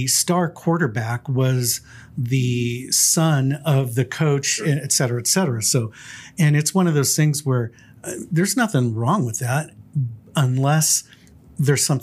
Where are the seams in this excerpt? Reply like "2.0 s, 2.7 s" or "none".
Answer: none